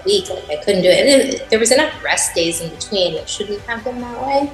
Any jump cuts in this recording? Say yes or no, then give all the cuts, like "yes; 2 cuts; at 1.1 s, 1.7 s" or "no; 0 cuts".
no; 0 cuts